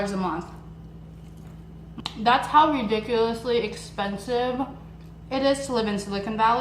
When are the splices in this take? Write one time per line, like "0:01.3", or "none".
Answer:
0:02.0